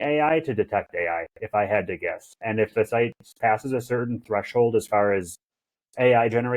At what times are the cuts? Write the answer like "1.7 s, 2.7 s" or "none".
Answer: none